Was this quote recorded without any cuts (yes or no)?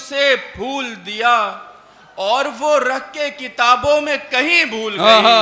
yes